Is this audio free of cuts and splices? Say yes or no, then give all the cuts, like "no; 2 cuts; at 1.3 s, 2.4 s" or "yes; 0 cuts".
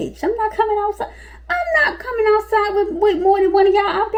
yes; 0 cuts